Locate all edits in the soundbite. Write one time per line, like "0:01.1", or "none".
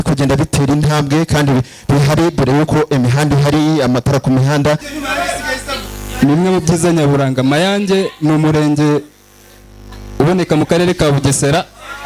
0:04.9